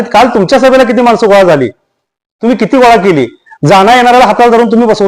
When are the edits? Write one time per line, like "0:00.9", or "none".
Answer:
none